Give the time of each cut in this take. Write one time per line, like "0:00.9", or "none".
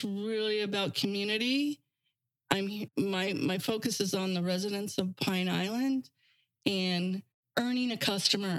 0:02.9
0:07.3